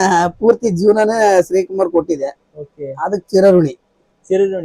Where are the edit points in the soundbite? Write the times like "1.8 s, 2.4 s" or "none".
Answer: none